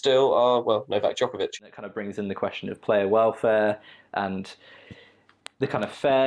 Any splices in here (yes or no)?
yes